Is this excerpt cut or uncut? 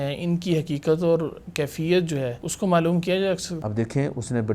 cut